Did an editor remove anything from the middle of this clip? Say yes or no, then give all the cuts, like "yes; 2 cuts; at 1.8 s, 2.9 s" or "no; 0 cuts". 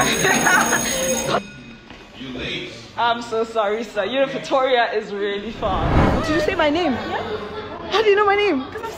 yes; 2 cuts; at 1.4 s, 6.0 s